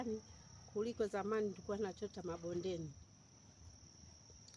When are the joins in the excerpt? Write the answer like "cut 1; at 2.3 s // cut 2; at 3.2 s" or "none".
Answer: none